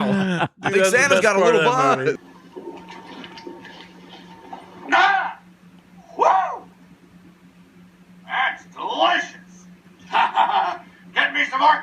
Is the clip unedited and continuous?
no; 1 cut; at 2.2 s

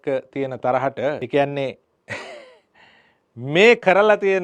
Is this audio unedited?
no; 1 cut; at 1.2 s

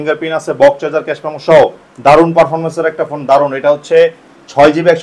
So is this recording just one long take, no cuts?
yes; 0 cuts

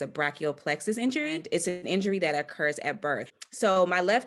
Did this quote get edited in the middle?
yes; 2 cuts; at 1.4 s, 3.4 s

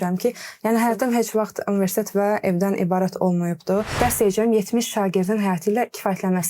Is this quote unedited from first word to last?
no; 1 cut; at 3.9 s

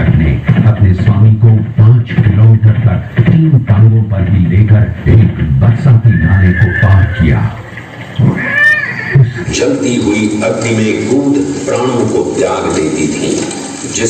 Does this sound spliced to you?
yes; 1 cut; at 9.4 s

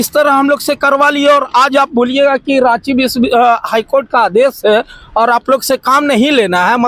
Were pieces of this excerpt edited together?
no; 0 cuts

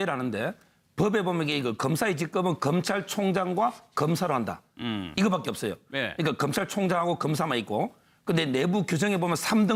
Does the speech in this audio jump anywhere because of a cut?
no; 0 cuts

